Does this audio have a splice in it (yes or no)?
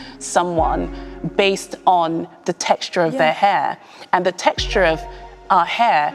no